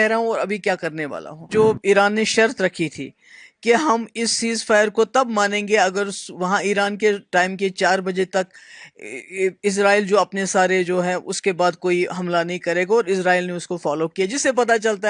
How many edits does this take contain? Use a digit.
1